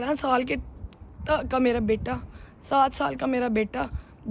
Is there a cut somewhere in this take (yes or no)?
no